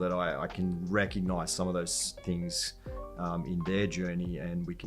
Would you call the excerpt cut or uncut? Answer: uncut